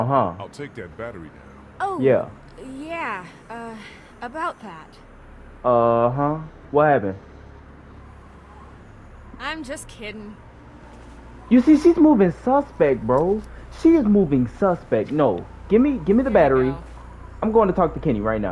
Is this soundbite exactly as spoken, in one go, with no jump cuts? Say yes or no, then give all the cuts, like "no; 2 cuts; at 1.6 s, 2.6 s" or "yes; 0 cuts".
yes; 0 cuts